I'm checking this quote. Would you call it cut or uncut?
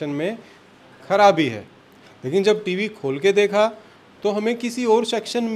uncut